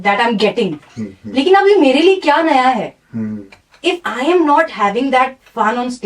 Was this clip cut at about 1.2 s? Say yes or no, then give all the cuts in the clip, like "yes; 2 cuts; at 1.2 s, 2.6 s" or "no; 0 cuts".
no; 1 cut; at 3.6 s